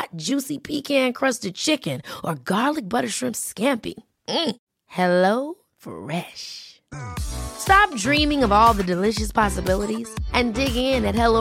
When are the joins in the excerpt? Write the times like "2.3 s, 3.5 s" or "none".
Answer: none